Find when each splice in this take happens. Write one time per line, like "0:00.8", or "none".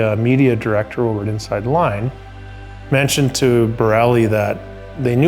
none